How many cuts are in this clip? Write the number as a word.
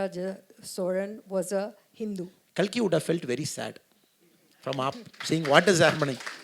one